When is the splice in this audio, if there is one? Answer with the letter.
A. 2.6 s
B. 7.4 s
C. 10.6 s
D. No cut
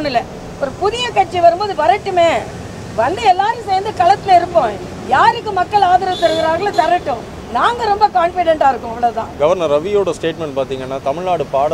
D